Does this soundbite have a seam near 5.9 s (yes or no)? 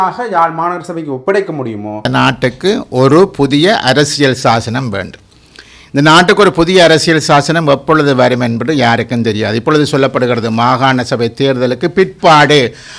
no